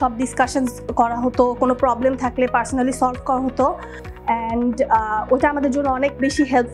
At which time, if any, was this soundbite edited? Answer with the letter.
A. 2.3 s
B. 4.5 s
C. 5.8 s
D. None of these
D